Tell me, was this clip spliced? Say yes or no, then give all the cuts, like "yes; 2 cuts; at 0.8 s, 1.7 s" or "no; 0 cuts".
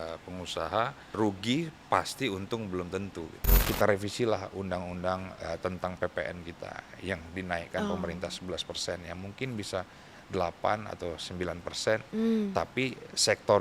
yes; 2 cuts; at 1.1 s, 3.5 s